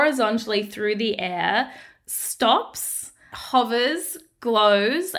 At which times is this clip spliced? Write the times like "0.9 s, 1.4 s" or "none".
none